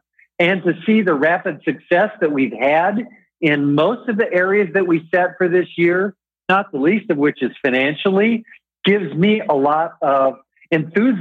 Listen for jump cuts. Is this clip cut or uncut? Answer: uncut